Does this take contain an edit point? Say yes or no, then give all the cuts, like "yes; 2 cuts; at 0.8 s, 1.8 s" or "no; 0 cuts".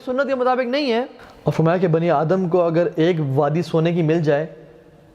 yes; 1 cut; at 1.2 s